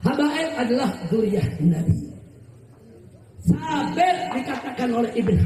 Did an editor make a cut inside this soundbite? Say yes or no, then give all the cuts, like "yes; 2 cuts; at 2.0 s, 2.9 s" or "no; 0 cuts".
no; 0 cuts